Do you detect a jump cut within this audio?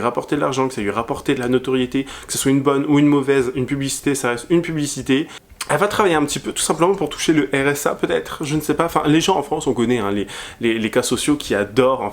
yes; 1 cut; at 5.4 s

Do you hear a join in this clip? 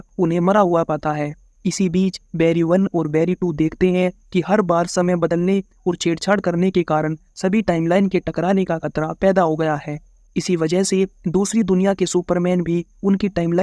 no; 0 cuts

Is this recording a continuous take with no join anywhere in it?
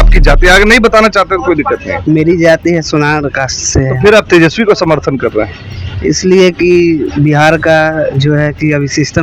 yes; 0 cuts

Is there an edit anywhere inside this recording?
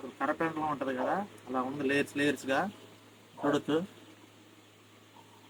no; 0 cuts

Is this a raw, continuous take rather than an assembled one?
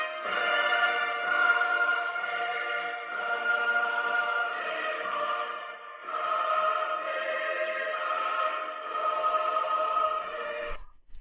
no; 1 cut; at 9.5 s

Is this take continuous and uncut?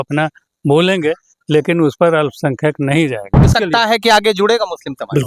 no; 1 cut; at 3.5 s

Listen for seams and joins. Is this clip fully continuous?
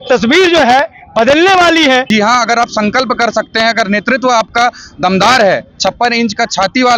no; 1 cut; at 2.1 s

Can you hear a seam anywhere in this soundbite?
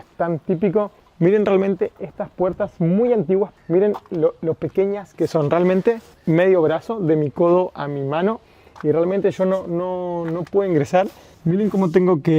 yes; 4 cuts; at 1.0 s, 3.5 s, 6.2 s, 11.2 s

